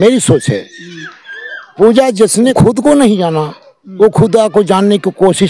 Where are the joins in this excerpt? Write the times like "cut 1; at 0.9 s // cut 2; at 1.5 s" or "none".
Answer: cut 1; at 2.5 s